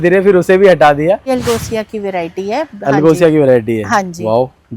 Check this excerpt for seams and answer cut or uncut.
cut